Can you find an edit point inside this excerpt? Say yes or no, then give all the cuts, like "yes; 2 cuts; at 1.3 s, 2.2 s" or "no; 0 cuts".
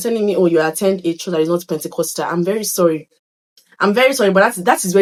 no; 0 cuts